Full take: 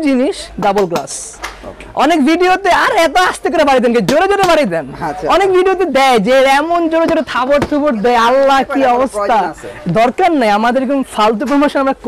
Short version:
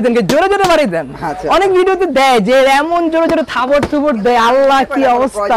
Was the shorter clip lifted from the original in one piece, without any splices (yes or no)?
yes